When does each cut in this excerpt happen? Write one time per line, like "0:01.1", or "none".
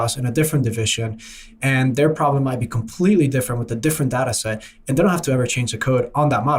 none